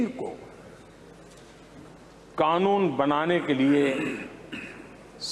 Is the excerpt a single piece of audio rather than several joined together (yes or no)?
yes